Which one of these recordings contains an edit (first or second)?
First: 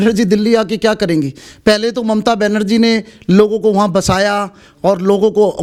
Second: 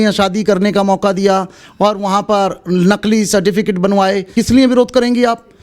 second